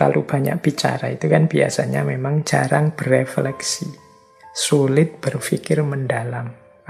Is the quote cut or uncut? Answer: uncut